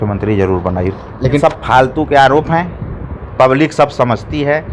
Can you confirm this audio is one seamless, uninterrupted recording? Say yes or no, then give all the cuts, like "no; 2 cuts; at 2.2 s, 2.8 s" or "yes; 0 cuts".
no; 1 cut; at 1.4 s